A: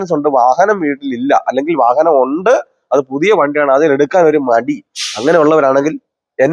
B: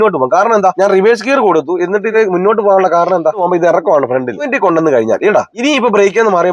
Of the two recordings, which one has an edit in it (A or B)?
B